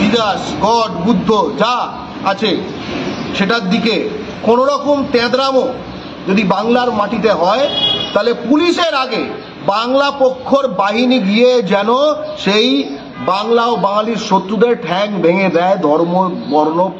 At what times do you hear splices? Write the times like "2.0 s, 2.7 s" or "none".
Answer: none